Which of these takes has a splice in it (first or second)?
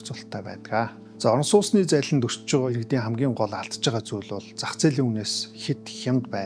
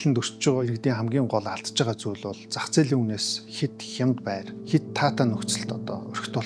first